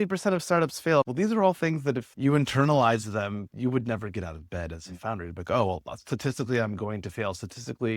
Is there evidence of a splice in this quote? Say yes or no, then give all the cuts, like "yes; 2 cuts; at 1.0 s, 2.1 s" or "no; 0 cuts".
yes; 2 cuts; at 1.1 s, 3.5 s